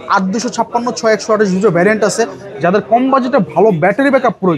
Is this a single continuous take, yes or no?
yes